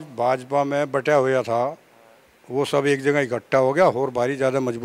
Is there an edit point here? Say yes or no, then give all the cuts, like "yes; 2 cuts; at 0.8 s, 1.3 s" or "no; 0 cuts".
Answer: no; 0 cuts